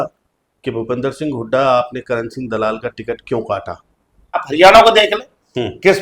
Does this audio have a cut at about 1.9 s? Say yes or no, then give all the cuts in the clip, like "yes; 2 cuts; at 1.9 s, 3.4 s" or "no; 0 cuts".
no; 1 cut; at 4.4 s